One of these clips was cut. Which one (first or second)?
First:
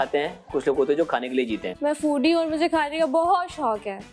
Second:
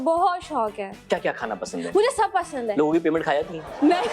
first